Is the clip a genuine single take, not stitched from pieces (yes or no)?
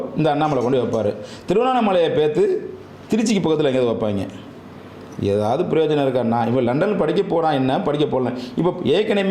yes